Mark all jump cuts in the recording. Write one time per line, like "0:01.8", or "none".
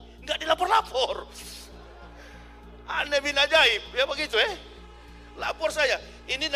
none